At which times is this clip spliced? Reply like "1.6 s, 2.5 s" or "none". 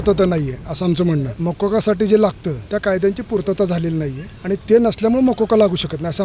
1.3 s, 2.5 s, 4.3 s